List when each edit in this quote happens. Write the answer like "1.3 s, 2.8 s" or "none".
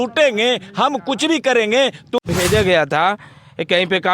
2.2 s